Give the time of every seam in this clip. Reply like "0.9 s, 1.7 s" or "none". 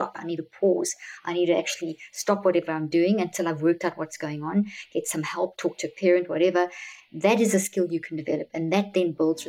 none